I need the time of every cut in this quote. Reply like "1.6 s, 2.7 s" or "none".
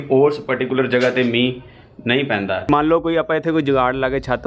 2.7 s